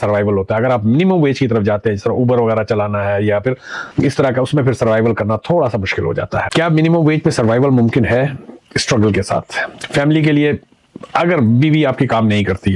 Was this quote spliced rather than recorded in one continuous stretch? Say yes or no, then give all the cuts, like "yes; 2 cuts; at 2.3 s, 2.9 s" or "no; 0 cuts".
yes; 1 cut; at 6.5 s